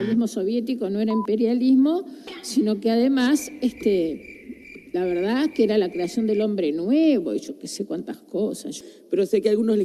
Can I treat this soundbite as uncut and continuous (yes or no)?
no